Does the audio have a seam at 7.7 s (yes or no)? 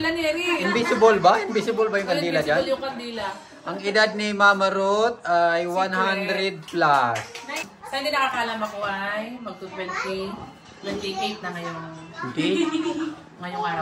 yes